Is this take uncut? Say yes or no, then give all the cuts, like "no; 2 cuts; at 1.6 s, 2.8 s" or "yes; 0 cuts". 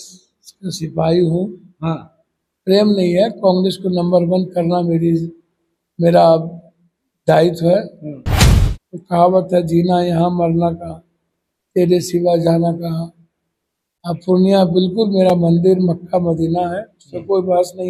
yes; 0 cuts